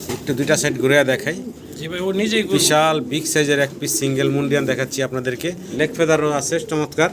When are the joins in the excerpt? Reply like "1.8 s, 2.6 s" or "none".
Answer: 5.6 s